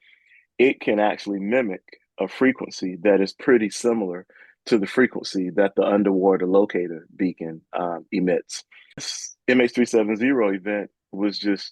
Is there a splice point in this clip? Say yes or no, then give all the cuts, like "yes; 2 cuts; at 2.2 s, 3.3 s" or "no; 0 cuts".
yes; 1 cut; at 9.1 s